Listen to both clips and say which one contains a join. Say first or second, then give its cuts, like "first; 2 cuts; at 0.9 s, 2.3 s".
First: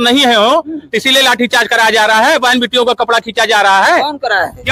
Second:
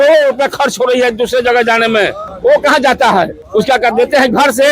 second; 2 cuts; at 2.2 s, 3.4 s